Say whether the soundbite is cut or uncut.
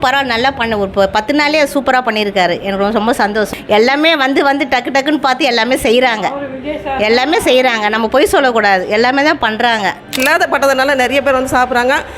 cut